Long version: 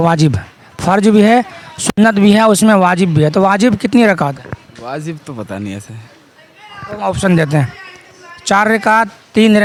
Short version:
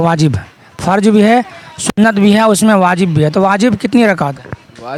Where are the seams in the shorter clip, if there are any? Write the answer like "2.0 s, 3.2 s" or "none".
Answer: none